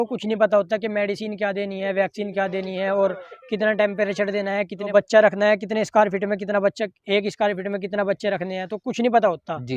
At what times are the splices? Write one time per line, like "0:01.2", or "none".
0:04.9